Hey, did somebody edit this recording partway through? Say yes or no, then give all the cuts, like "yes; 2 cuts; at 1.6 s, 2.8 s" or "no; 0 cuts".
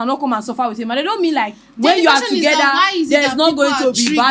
no; 0 cuts